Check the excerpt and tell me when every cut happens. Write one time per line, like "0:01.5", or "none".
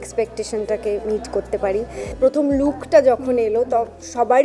0:02.0